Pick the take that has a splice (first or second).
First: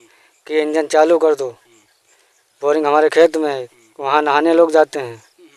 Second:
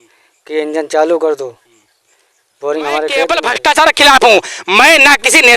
second